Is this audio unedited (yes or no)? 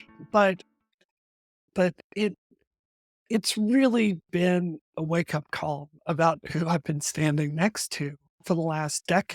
no